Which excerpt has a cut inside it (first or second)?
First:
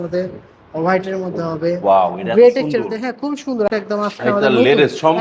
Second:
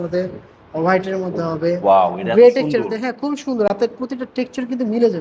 first